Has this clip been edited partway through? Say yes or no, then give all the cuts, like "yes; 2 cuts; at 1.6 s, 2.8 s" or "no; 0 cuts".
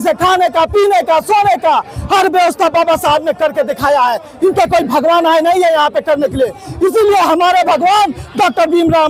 no; 0 cuts